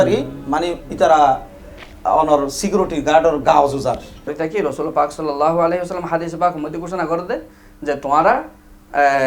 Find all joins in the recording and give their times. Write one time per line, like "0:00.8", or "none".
0:04.3

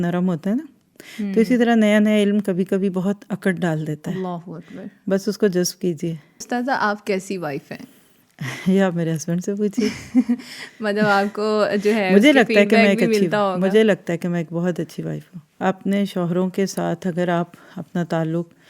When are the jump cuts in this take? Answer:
0:06.5
0:15.4

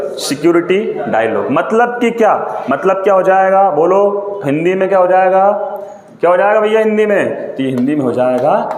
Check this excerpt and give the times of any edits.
none

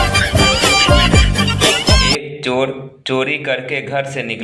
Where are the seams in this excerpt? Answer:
0:02.0

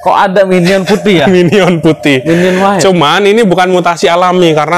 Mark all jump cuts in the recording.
none

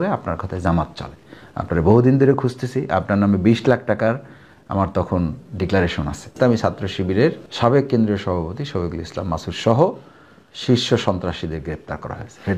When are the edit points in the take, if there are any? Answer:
0:06.3
0:07.5

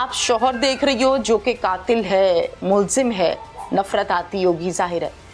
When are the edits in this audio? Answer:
none

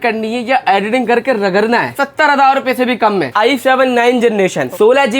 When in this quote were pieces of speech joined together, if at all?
0:02.0
0:03.3

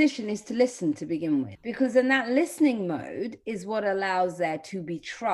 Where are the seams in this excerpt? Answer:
0:01.6

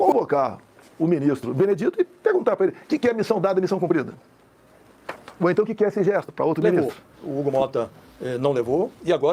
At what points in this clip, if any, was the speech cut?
0:06.7

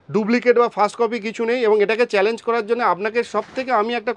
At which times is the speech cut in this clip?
none

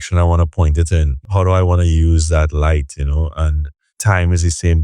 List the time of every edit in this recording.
0:01.3
0:03.9

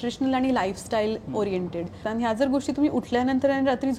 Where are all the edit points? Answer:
0:02.0

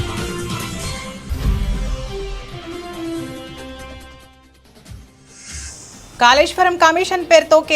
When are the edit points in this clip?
0:06.2

